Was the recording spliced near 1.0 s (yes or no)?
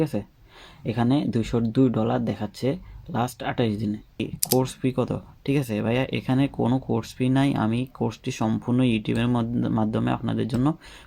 no